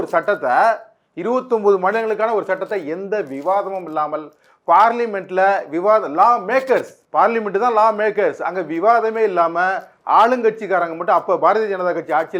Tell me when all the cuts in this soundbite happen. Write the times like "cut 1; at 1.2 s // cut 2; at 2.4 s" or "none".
cut 1; at 7.0 s